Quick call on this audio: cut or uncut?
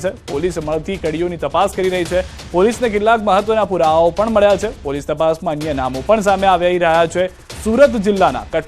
cut